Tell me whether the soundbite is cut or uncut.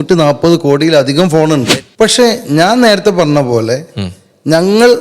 cut